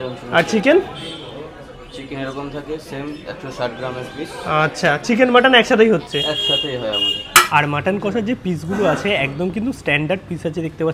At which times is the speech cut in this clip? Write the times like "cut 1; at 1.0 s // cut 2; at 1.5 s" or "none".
cut 1; at 7.5 s